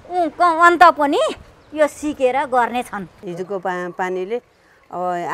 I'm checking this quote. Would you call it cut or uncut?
cut